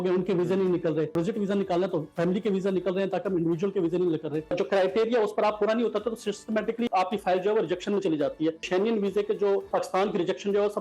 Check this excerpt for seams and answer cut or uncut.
cut